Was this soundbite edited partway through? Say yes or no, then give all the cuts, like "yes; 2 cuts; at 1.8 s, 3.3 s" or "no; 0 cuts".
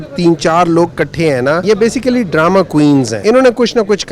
yes; 2 cuts; at 1.6 s, 3.1 s